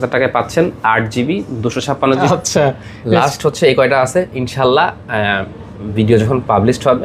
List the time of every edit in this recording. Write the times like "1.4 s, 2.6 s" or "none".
2.2 s